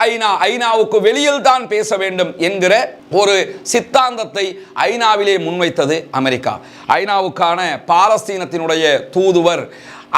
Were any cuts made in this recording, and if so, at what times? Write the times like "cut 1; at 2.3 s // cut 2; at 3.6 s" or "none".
none